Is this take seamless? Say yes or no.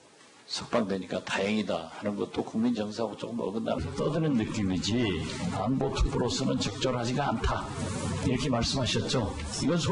yes